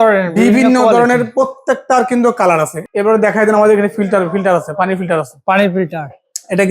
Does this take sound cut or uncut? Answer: cut